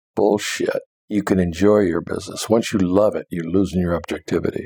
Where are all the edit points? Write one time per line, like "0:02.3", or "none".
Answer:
0:00.9